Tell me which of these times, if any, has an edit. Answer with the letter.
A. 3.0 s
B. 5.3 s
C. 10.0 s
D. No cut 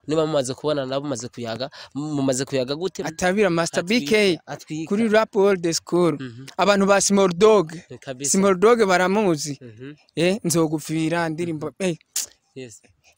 A